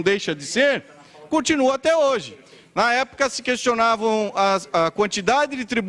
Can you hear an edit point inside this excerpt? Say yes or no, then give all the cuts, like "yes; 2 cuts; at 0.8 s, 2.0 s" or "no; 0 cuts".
no; 0 cuts